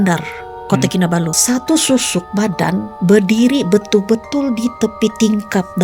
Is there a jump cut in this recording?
yes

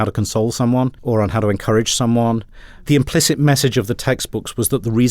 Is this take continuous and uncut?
no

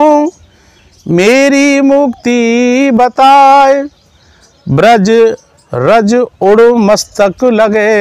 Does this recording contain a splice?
no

